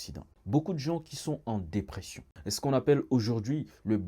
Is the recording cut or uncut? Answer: cut